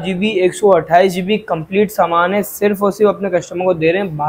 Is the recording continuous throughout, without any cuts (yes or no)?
yes